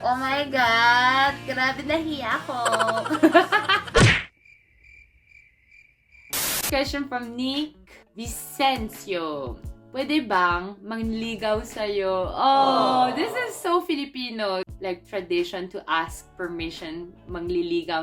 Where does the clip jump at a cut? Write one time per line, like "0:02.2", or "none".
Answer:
none